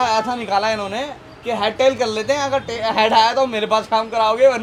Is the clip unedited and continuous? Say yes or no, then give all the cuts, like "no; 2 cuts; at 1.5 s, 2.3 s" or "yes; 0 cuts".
yes; 0 cuts